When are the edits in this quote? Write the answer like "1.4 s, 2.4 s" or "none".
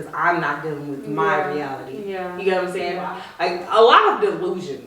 3.2 s